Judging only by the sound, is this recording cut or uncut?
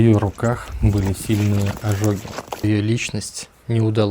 cut